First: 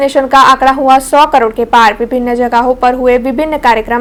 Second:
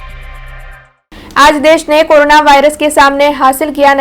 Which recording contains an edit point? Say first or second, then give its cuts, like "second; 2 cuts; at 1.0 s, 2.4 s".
second; 1 cut; at 0.9 s